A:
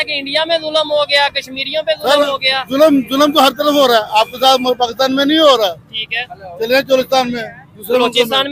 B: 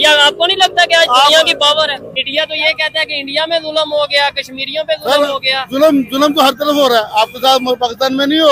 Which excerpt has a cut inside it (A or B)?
B